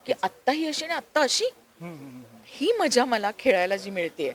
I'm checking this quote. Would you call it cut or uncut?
uncut